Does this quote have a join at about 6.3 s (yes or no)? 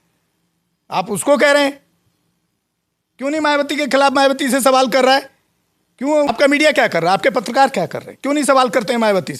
yes